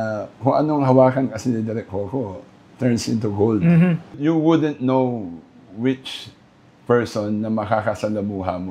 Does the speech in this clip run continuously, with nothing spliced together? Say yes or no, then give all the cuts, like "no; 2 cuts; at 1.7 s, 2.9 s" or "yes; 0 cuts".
no; 1 cut; at 4.2 s